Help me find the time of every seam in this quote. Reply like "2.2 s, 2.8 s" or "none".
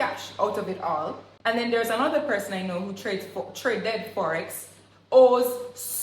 1.3 s